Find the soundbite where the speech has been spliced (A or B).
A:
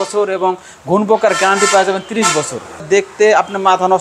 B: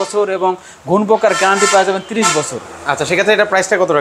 A